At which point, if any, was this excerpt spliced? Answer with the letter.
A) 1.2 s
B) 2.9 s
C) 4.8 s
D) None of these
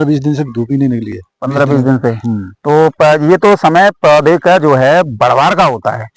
D